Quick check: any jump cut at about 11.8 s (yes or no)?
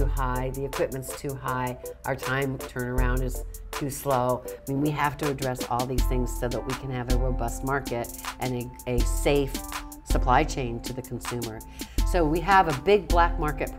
yes